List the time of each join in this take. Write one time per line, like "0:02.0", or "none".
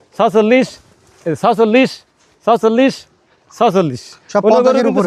none